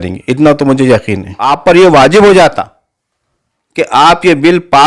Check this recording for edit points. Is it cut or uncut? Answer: cut